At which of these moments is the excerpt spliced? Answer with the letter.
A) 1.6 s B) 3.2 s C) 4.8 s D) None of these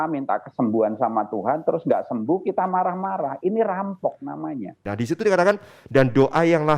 C